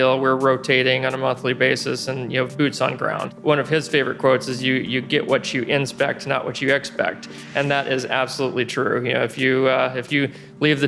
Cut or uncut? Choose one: cut